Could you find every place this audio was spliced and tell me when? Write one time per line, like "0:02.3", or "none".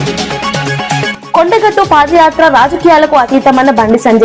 0:01.1